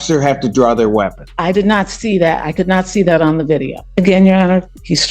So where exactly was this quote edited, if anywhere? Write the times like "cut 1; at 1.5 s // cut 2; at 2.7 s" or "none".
cut 1; at 1.2 s // cut 2; at 3.8 s